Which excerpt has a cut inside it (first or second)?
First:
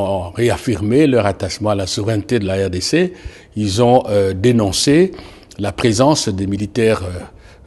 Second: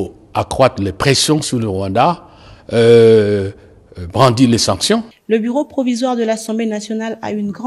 second